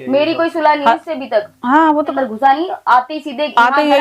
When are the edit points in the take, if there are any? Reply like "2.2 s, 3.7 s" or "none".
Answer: 2.0 s